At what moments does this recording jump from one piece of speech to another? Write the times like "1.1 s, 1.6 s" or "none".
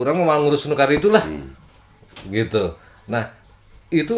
none